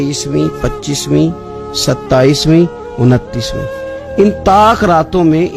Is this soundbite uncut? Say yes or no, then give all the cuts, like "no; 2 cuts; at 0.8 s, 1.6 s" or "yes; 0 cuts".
yes; 0 cuts